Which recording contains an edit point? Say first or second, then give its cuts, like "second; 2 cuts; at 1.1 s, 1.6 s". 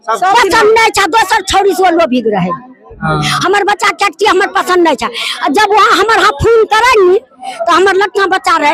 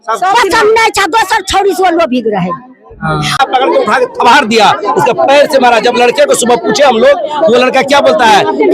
second; 1 cut; at 3.4 s